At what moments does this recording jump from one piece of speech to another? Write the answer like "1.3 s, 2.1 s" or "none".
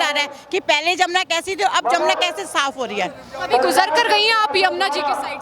none